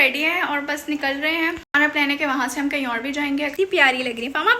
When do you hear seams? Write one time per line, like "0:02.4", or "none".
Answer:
0:03.5